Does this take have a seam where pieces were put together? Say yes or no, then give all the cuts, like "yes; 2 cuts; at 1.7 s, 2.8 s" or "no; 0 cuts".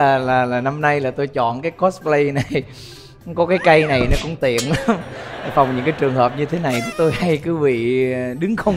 no; 0 cuts